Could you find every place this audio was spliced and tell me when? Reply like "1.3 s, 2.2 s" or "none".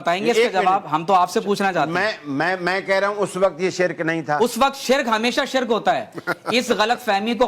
none